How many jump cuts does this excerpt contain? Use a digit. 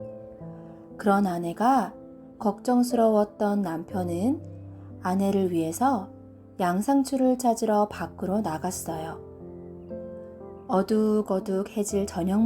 3